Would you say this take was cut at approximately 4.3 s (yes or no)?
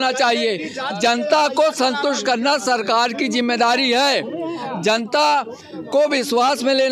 no